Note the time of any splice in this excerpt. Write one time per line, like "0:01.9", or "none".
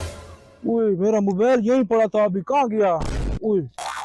none